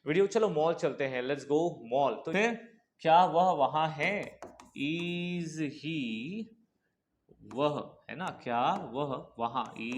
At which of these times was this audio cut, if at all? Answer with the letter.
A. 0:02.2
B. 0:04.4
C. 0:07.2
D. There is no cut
A